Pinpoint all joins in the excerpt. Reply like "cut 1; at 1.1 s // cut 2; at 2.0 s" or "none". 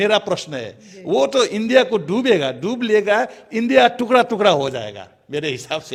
none